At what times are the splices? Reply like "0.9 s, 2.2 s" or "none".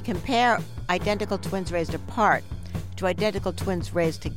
none